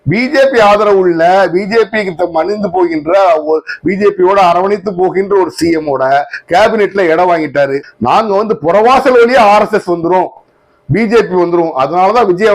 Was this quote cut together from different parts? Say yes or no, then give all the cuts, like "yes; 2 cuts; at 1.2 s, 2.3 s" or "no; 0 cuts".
yes; 1 cut; at 7.9 s